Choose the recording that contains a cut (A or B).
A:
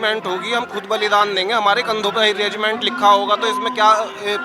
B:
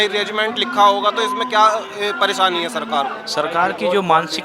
B